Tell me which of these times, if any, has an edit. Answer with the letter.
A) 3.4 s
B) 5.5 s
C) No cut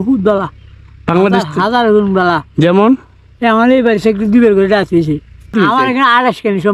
B